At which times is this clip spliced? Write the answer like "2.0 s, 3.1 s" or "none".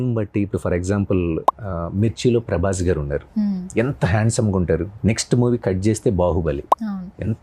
4.9 s